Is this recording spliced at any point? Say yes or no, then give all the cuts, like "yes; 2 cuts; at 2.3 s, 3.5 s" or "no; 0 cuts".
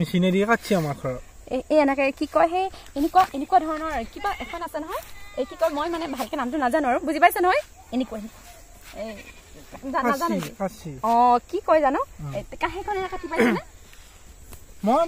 no; 0 cuts